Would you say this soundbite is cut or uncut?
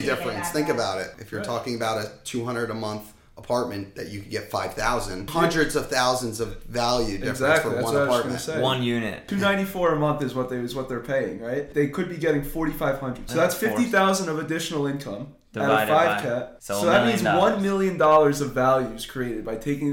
cut